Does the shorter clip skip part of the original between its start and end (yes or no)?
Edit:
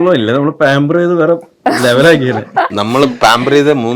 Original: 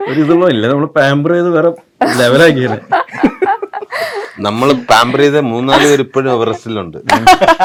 yes